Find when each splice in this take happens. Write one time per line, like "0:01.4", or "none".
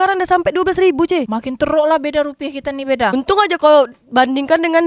0:01.4
0:03.1